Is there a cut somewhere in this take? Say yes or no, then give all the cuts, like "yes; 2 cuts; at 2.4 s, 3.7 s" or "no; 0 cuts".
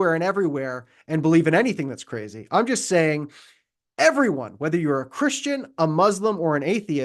no; 0 cuts